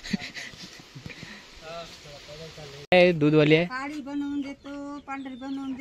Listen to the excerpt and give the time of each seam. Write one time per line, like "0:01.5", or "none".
0:02.9